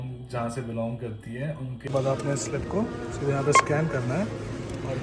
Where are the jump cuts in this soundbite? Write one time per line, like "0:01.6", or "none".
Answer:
0:01.9